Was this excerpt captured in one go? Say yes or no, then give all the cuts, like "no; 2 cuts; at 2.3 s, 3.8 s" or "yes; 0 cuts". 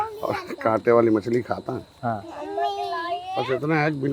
yes; 0 cuts